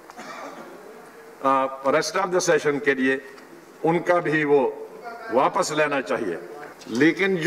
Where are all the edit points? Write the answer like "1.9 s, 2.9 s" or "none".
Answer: 6.6 s